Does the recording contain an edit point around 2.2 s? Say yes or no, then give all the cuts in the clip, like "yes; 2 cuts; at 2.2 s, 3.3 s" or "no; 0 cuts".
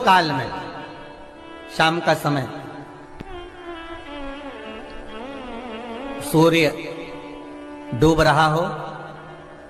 no; 0 cuts